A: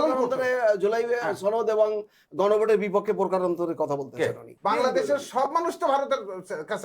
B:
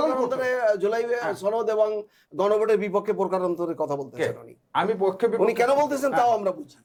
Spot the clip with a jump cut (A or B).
A